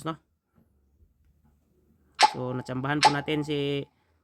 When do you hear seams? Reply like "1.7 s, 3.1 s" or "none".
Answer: none